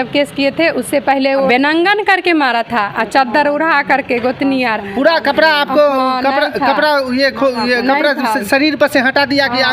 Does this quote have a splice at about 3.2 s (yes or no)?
no